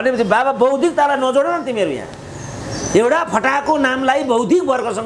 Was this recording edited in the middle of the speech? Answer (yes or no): no